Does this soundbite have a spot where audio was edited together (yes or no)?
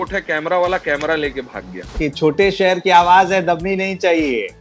yes